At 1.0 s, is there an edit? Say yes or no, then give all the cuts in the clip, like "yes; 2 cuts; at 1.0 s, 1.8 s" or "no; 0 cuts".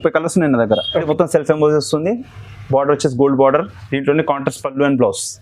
yes; 1 cut; at 1.0 s